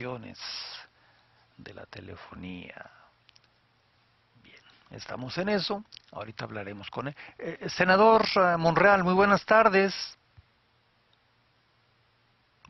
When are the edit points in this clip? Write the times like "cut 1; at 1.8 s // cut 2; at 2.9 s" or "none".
cut 1; at 1.1 s

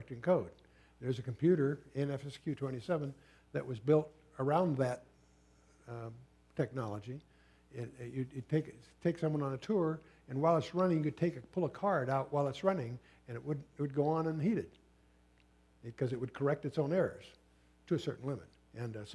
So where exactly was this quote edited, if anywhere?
cut 1; at 6.3 s

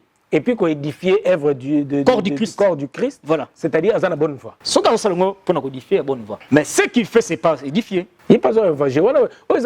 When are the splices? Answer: cut 1; at 4.5 s // cut 2; at 6.3 s // cut 3; at 8.1 s

